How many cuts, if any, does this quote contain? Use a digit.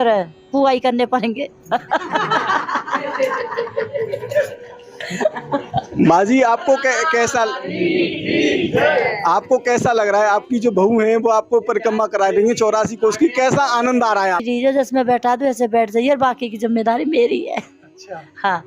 1